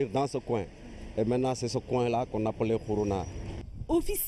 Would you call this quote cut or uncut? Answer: cut